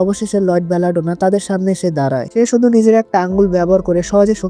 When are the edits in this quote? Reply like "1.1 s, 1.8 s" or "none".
none